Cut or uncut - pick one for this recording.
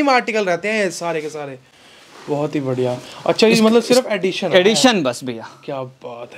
uncut